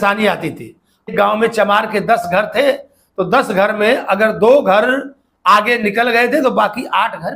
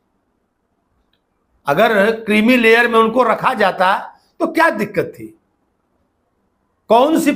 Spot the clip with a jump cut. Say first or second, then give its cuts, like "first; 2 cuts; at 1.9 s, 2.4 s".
first; 1 cut; at 1.1 s